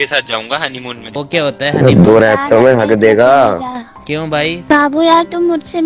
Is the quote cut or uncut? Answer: cut